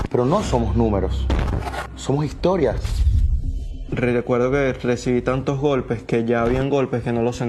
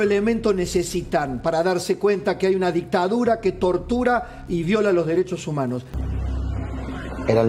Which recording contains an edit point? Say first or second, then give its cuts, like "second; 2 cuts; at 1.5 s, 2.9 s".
second; 1 cut; at 5.9 s